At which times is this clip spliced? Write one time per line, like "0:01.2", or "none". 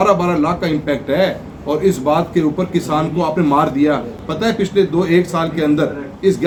none